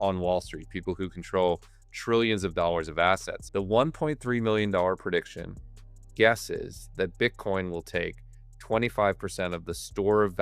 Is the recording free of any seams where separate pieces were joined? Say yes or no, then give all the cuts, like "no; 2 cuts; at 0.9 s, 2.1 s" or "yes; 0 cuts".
no; 1 cut; at 3.4 s